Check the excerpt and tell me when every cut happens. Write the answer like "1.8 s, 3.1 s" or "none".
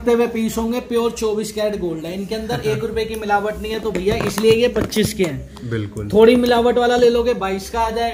none